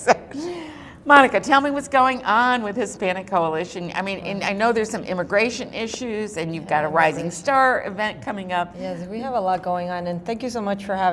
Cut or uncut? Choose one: cut